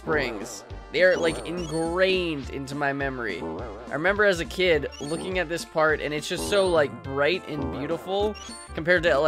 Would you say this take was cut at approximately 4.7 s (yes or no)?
no